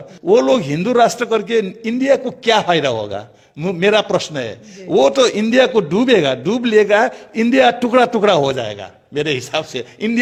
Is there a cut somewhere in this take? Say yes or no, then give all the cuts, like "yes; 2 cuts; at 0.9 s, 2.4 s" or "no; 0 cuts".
no; 0 cuts